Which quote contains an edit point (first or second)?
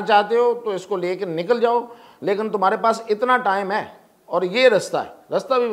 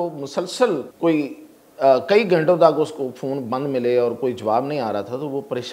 second